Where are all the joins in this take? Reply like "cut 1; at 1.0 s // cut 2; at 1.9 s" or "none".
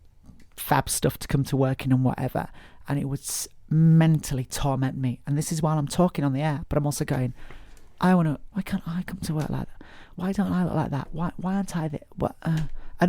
cut 1; at 6.6 s // cut 2; at 8.5 s // cut 3; at 10.1 s